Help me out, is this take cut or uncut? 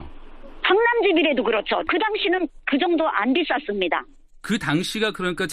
cut